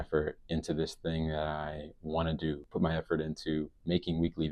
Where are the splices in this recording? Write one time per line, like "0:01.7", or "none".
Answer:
0:02.7